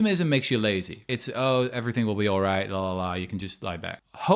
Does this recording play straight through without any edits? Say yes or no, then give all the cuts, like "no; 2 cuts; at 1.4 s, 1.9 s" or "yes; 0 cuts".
no; 1 cut; at 1.1 s